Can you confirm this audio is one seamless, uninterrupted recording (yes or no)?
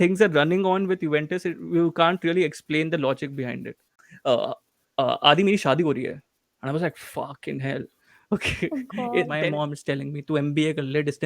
no